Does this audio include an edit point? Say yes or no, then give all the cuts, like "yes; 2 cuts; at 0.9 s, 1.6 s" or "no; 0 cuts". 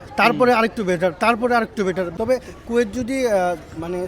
yes; 1 cut; at 2.1 s